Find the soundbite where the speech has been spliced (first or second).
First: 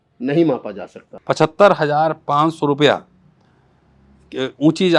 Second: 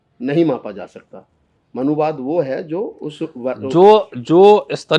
first